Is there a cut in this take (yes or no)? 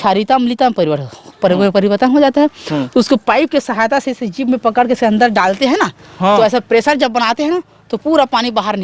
no